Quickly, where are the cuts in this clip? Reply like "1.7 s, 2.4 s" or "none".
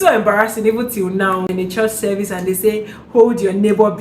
1.5 s